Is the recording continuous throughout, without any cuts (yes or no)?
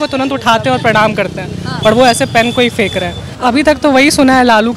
no